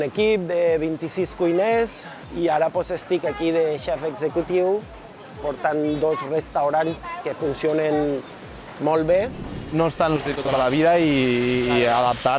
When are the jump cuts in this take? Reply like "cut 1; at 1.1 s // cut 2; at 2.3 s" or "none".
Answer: cut 1; at 2.3 s // cut 2; at 9.4 s